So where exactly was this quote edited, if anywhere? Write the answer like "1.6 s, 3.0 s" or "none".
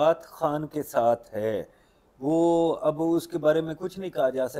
none